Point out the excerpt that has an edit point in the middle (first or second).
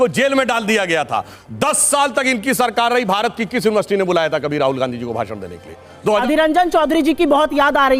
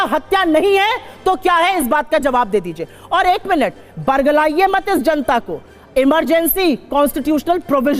first